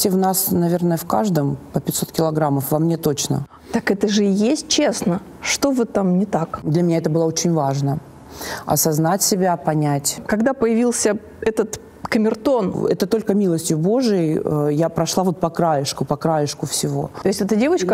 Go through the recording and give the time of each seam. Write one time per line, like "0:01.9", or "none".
0:03.4
0:06.6
0:10.1
0:12.8
0:17.1